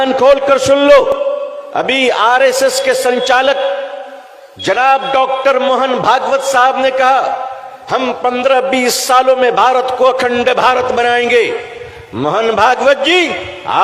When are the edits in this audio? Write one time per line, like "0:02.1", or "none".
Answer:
0:01.1